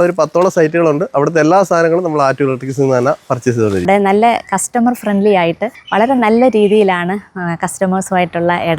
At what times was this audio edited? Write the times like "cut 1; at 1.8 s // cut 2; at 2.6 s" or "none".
cut 1; at 3.9 s // cut 2; at 5.7 s

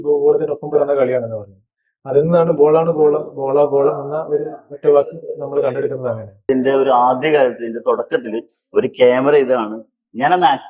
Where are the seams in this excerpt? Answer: cut 1; at 6.5 s

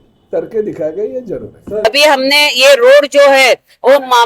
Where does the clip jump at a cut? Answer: cut 1; at 1.8 s

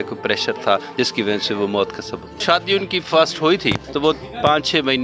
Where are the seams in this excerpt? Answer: cut 1; at 2.4 s // cut 2; at 3.9 s

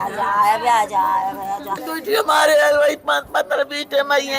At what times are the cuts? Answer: cut 1; at 1.9 s

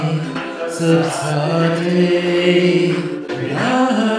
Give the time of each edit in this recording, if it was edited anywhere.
none

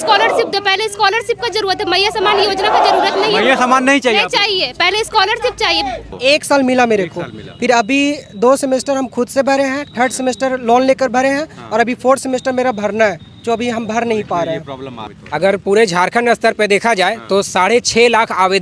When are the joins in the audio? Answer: cut 1; at 6.1 s // cut 2; at 15.1 s

